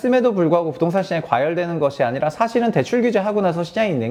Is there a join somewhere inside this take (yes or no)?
no